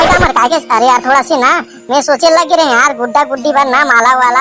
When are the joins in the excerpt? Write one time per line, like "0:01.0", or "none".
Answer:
none